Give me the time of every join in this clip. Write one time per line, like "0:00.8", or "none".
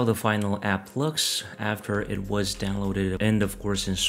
none